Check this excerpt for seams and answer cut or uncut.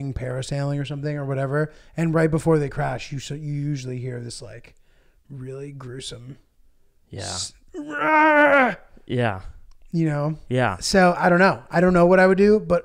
uncut